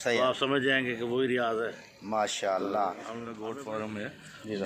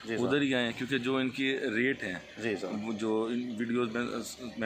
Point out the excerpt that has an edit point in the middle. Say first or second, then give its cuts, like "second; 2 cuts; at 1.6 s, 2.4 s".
first; 1 cut; at 3.4 s